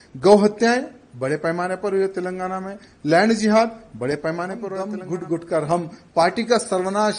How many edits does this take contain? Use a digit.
1